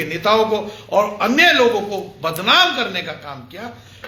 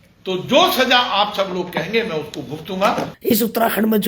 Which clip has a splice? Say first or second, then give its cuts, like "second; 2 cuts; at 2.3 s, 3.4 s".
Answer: second; 1 cut; at 3.1 s